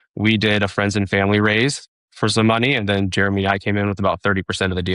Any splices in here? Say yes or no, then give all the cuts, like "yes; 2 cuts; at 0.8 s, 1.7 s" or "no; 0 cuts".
yes; 1 cut; at 2.0 s